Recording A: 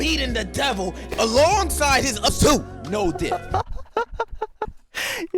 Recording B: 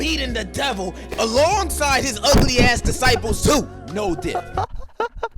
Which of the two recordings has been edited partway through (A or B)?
A